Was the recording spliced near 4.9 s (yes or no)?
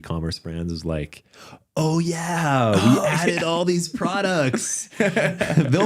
no